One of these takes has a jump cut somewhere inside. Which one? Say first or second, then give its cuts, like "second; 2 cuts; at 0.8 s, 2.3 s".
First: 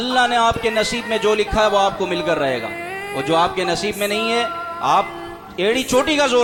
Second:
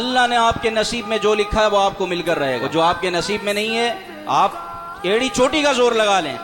second; 1 cut; at 2.6 s